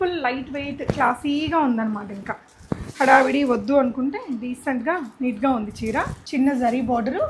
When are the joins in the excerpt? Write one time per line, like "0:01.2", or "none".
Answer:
0:06.2